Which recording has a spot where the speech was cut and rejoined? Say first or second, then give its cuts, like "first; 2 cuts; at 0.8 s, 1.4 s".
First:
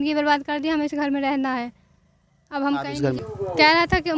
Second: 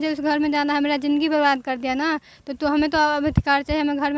first; 1 cut; at 3.2 s